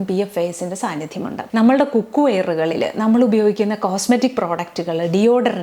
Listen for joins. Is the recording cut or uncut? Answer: cut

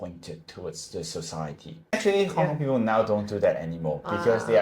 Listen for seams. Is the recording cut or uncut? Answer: cut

